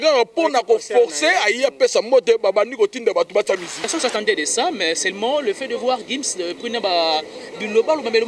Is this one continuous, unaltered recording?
no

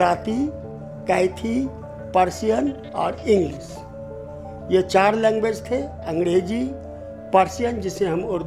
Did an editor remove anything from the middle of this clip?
no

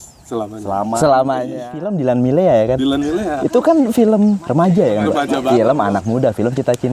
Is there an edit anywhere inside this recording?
yes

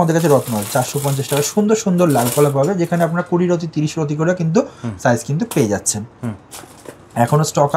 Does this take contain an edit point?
no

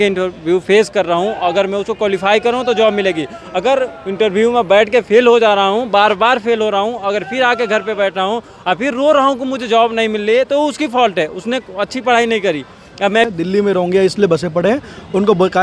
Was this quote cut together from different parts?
yes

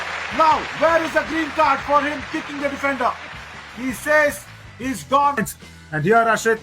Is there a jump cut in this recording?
yes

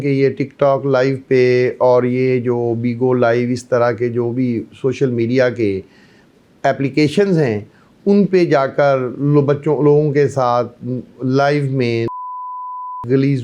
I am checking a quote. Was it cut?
no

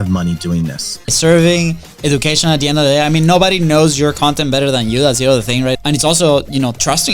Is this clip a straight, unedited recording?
no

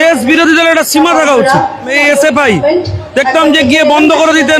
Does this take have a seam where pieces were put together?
yes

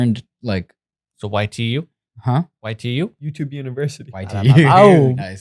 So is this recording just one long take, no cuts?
no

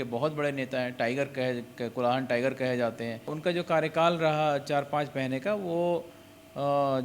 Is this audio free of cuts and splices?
no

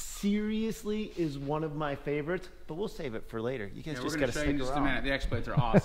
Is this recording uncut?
yes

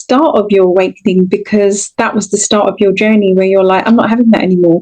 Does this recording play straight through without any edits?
yes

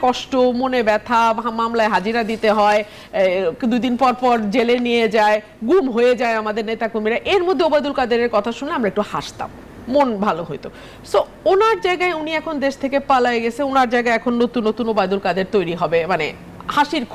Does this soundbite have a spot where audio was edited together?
no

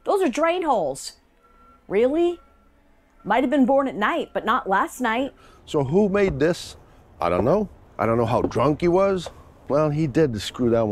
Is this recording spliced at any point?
yes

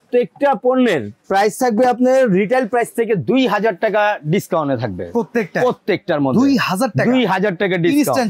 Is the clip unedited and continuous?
yes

